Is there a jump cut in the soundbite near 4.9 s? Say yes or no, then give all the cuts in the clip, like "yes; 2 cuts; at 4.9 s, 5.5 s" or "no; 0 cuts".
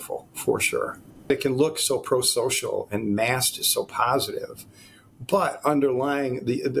no; 1 cut; at 1.3 s